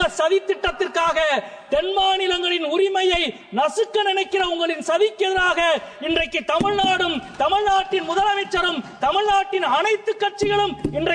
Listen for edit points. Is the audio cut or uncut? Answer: uncut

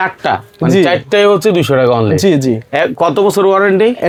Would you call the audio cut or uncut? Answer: uncut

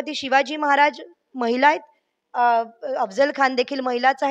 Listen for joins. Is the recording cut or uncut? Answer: uncut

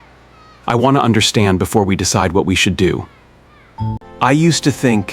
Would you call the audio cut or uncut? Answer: cut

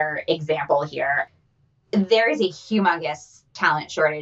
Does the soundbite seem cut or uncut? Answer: cut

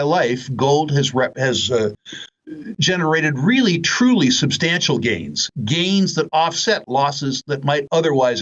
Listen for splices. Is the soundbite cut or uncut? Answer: uncut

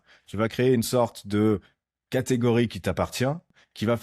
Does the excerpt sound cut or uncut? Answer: uncut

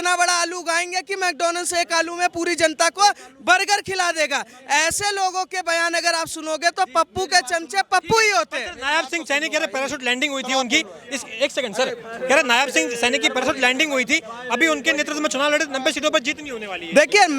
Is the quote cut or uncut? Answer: uncut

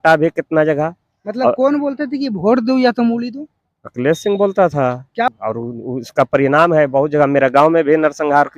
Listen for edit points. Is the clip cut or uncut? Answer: cut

